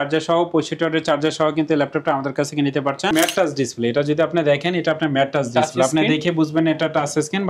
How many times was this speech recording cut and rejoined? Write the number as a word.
one